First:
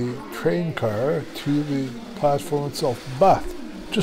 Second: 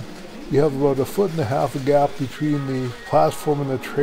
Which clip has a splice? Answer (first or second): second